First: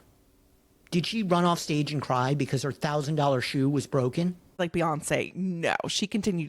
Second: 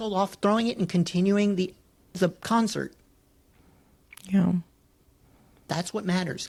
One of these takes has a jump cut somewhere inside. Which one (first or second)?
first